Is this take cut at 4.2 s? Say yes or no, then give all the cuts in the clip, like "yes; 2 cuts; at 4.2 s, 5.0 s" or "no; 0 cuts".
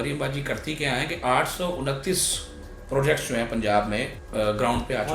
yes; 1 cut; at 4.2 s